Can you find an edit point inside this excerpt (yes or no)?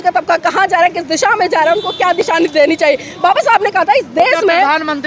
no